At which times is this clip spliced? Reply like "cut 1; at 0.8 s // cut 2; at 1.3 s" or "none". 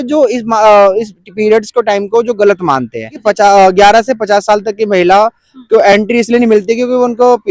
cut 1; at 3.1 s